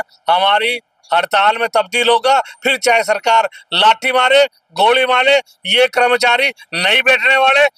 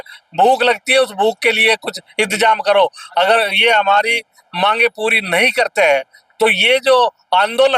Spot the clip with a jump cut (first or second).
second